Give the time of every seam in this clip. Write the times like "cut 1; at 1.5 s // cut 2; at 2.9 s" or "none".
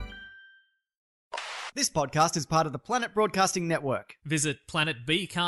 cut 1; at 1.0 s